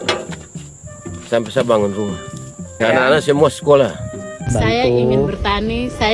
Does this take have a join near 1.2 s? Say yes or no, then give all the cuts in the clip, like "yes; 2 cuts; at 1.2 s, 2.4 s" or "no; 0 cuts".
no; 2 cuts; at 2.7 s, 4.5 s